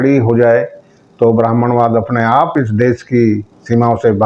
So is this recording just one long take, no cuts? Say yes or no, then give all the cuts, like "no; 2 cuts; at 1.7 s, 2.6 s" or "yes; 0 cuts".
no; 1 cut; at 2.5 s